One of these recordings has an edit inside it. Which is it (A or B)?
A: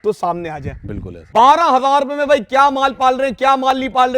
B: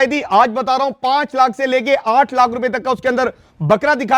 A